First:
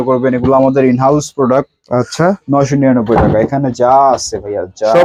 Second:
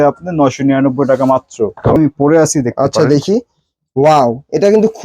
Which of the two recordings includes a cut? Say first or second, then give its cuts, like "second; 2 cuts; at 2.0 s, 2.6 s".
second; 1 cut; at 2.0 s